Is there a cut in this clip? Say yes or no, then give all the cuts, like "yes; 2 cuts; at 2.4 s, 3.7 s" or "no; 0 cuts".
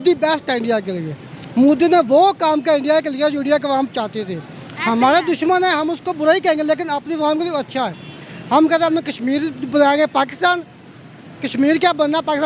no; 0 cuts